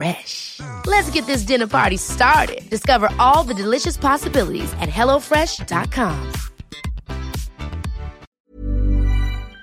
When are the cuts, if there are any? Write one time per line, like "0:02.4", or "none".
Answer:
0:08.2